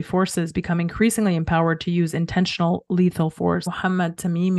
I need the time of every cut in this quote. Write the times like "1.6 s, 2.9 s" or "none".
3.7 s

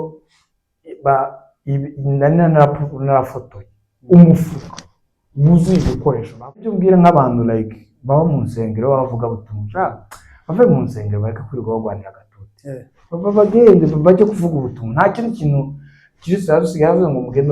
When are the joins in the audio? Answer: 6.7 s

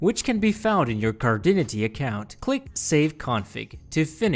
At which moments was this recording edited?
2.6 s

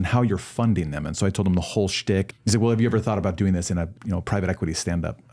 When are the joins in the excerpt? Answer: 2.3 s, 4.0 s

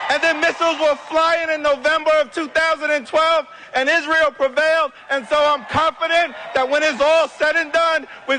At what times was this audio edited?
2.4 s

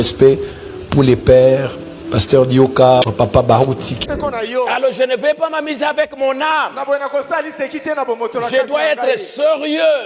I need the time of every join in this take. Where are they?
4.1 s

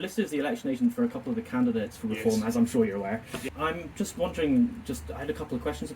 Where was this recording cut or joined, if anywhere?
3.5 s

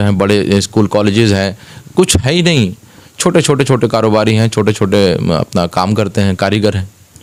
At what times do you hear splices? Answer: none

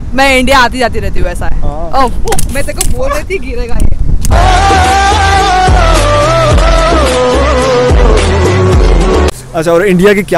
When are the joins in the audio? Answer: 4.3 s, 9.3 s

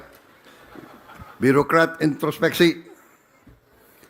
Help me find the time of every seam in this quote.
none

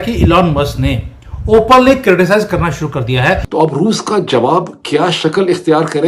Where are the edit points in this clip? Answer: 3.5 s

